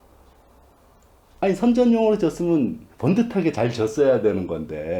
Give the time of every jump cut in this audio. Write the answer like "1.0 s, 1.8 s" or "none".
none